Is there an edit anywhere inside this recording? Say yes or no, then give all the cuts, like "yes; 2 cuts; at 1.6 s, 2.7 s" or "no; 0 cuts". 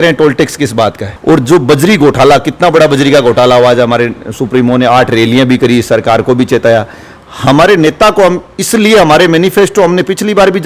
no; 0 cuts